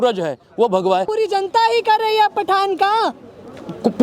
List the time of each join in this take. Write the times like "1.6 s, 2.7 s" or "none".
1.1 s